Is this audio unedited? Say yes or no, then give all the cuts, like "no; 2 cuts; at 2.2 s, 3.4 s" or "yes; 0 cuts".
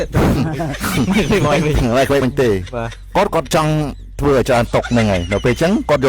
no; 1 cut; at 4.9 s